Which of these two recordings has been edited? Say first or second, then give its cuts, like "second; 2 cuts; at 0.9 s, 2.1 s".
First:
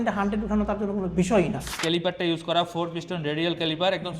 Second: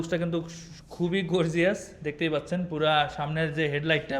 first; 1 cut; at 1.7 s